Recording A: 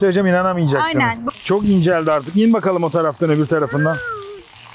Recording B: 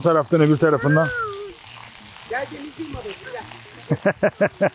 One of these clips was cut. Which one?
A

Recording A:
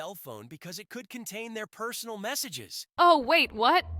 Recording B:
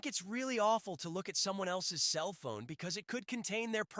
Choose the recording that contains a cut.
A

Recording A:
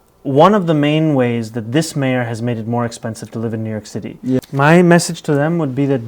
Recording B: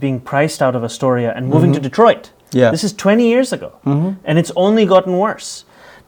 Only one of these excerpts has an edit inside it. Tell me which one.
A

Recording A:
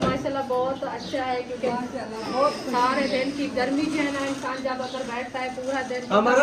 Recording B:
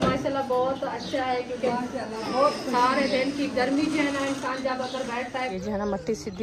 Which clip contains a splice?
B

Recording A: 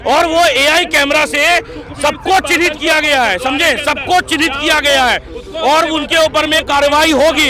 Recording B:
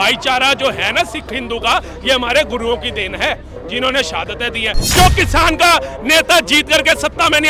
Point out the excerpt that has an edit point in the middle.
B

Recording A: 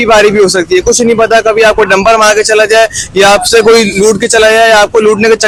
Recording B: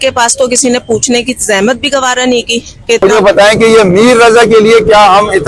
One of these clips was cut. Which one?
B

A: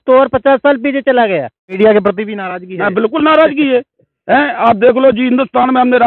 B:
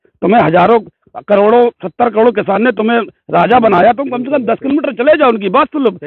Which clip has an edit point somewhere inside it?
A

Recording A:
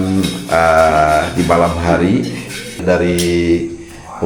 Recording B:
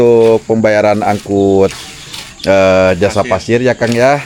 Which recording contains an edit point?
A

